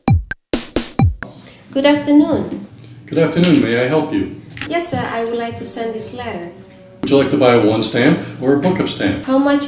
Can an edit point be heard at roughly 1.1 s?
yes; 1 cut; at 1.1 s

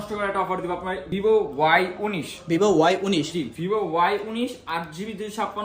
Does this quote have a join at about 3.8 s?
no; 1 cut; at 1.1 s

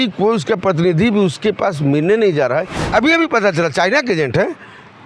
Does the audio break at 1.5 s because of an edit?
no; 1 cut; at 2.8 s

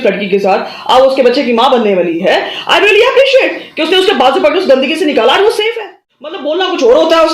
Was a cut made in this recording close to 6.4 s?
yes; 1 cut; at 6.4 s

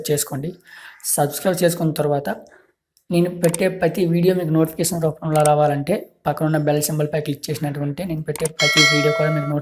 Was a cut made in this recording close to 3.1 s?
no; 0 cuts

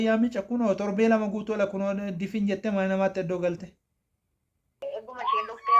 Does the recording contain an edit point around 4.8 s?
yes; 1 cut; at 4.8 s

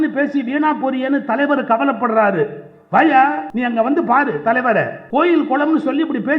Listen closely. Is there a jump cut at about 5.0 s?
yes; 2 cuts; at 3.5 s, 5.0 s

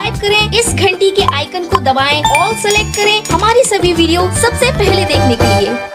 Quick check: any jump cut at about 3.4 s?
no; 0 cuts

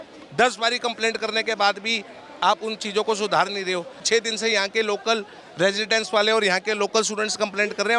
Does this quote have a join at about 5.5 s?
no; 1 cut; at 4.1 s

